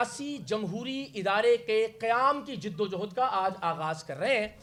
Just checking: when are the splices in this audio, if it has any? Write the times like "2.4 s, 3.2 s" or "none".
none

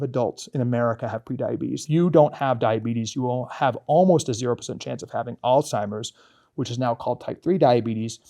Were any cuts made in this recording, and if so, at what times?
1.8 s

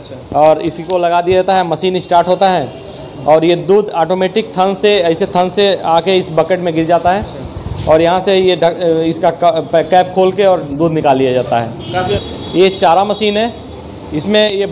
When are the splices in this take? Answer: 12.2 s

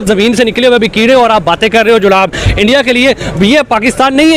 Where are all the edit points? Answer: none

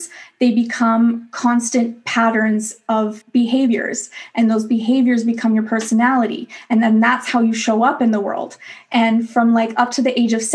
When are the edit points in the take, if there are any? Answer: 3.2 s

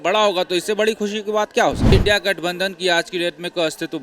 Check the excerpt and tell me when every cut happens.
1.9 s

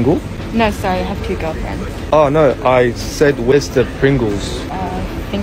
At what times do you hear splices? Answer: none

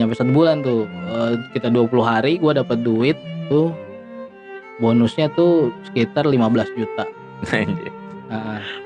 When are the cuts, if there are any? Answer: none

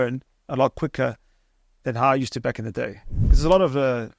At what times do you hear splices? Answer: 3.2 s

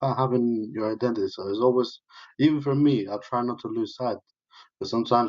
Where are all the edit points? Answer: none

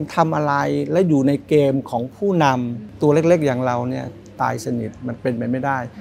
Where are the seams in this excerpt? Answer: 2.8 s

